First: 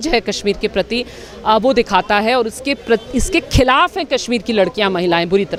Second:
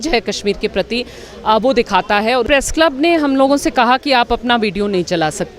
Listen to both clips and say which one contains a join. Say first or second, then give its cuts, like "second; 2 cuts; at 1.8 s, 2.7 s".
second; 1 cut; at 2.5 s